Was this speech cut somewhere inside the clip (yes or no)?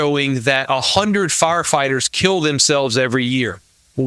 no